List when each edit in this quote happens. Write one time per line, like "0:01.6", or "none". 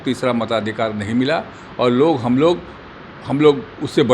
none

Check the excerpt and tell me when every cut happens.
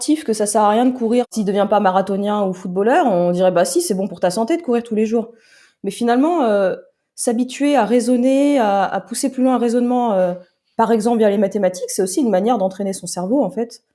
0:01.3

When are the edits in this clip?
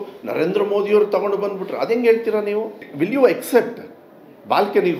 0:02.8

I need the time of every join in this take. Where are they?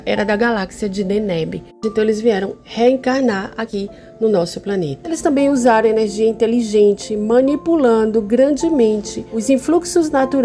0:02.6
0:03.7
0:05.2

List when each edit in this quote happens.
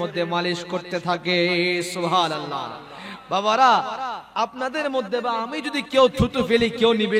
none

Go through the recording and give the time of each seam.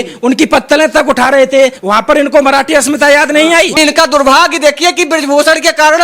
0:01.8
0:03.7

